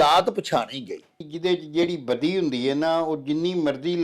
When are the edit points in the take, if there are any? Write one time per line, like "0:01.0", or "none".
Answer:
0:01.2